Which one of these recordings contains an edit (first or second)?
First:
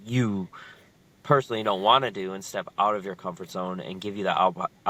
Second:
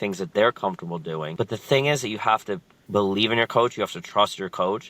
second